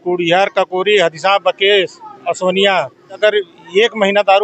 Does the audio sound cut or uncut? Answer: cut